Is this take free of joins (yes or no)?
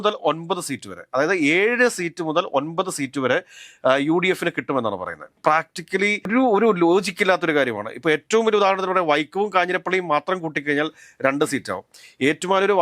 yes